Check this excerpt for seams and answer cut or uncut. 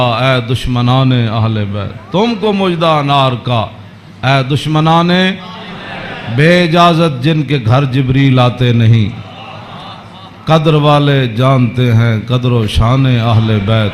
uncut